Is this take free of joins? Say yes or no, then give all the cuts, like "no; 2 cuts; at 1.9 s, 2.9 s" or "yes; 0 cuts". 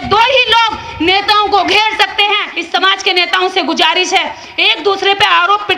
no; 1 cut; at 2.5 s